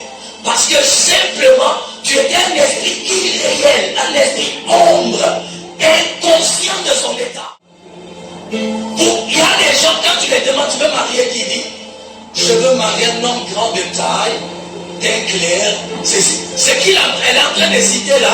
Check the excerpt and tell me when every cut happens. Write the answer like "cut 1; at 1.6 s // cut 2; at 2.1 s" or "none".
cut 1; at 7.4 s